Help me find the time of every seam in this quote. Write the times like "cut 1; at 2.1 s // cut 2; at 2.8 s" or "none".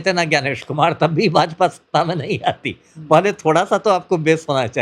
none